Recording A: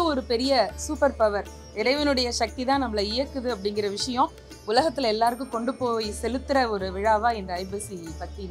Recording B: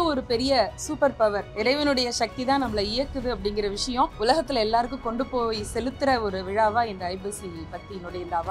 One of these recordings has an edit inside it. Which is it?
B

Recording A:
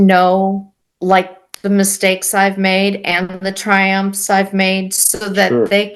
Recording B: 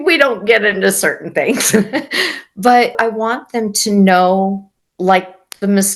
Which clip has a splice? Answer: B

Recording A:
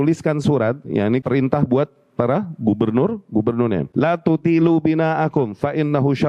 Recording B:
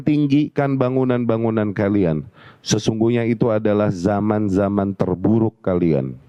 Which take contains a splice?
A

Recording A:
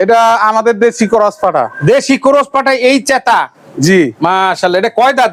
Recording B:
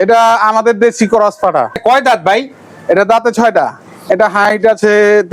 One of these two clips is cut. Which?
B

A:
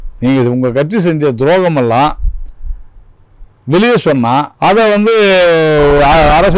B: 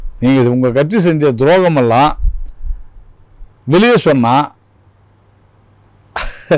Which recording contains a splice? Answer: A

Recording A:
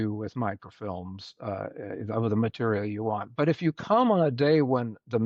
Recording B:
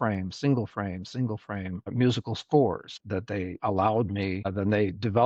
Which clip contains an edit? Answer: B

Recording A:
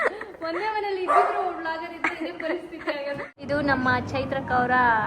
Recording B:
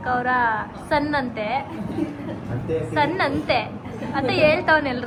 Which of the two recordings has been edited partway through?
A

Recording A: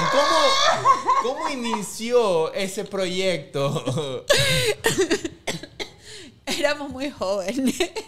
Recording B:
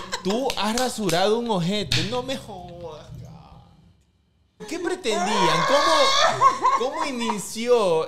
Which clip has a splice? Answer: B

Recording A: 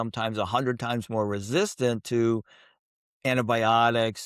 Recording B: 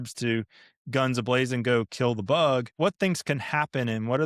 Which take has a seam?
B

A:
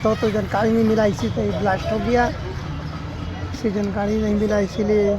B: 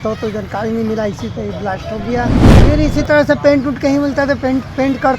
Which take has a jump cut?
B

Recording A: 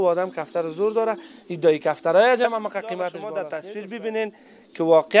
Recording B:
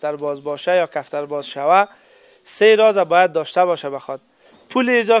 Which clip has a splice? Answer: A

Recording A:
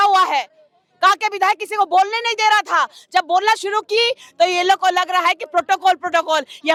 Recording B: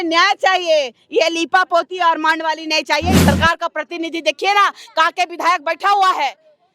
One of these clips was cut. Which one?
B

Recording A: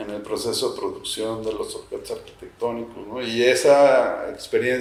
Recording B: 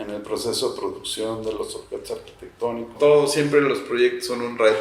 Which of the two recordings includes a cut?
B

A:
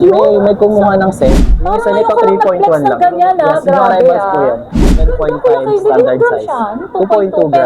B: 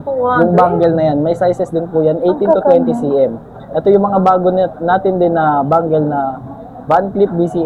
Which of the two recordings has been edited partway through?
A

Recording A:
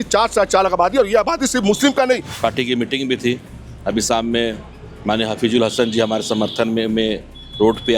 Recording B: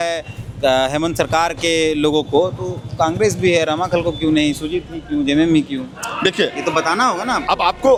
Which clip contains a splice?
A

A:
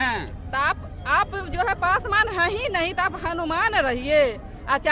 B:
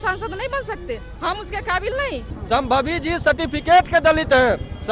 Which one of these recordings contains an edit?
B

